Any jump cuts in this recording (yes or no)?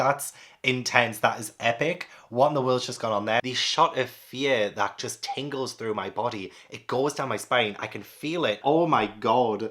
yes